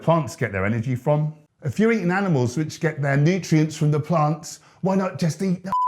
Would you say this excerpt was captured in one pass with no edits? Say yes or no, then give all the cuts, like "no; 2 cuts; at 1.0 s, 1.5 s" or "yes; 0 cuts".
no; 1 cut; at 1.4 s